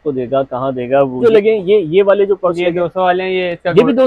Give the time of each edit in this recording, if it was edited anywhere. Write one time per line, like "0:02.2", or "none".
0:01.2